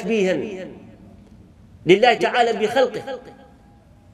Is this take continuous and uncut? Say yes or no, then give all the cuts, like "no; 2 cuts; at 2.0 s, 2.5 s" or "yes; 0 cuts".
yes; 0 cuts